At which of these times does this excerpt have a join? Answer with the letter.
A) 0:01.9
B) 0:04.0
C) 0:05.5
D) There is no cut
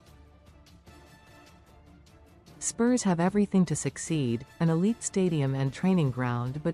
A